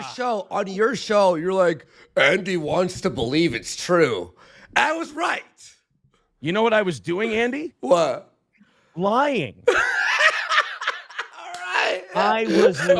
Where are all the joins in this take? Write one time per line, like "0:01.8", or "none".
none